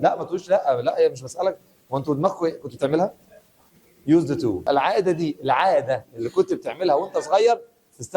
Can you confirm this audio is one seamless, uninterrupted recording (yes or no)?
no